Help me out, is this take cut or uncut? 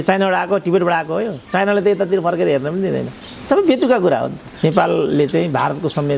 cut